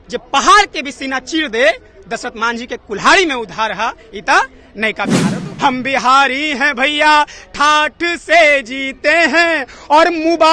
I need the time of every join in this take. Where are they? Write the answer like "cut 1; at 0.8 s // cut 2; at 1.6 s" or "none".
cut 1; at 5.4 s